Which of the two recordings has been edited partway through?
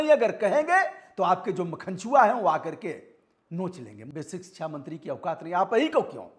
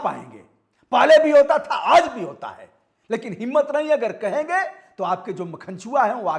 first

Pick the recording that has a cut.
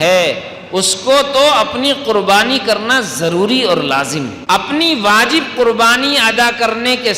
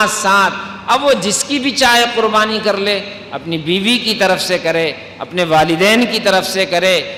first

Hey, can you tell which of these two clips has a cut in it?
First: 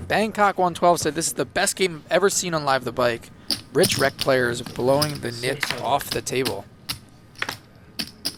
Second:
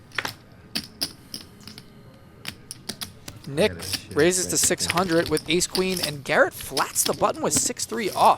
second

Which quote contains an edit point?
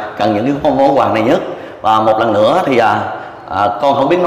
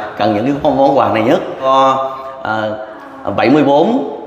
second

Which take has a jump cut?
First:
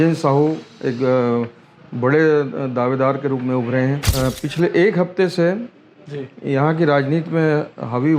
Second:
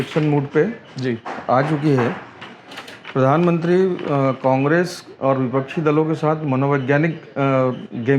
first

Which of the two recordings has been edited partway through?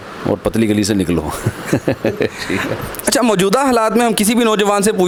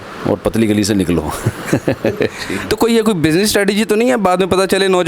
second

